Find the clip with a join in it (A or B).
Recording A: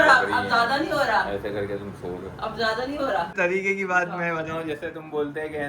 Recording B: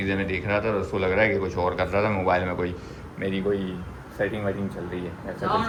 A